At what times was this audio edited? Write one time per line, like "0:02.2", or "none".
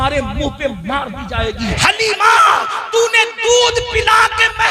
0:01.7